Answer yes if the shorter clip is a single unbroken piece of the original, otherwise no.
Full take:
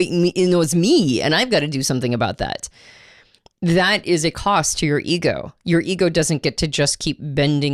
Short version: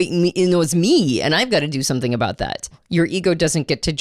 no